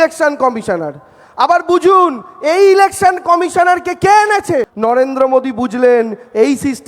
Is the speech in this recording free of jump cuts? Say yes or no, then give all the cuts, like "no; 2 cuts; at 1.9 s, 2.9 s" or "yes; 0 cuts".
no; 1 cut; at 4.7 s